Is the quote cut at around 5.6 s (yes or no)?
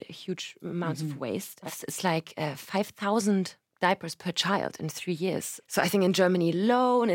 yes